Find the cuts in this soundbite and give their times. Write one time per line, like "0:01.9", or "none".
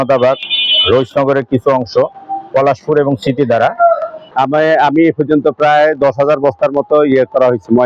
0:04.2